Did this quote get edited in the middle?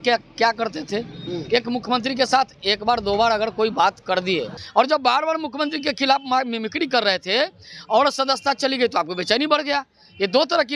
yes; 1 cut; at 4.6 s

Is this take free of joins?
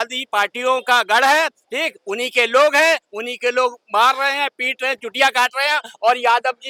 yes; 0 cuts

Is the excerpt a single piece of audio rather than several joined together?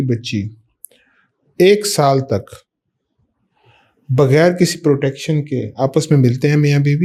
yes; 0 cuts

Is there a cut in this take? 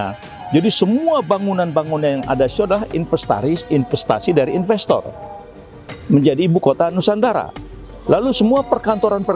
no; 0 cuts

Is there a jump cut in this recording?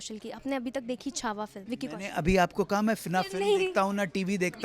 yes; 1 cut; at 1.6 s

